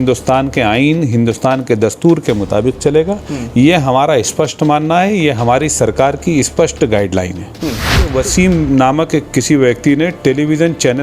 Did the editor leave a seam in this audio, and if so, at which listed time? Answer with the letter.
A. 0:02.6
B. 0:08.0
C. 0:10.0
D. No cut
B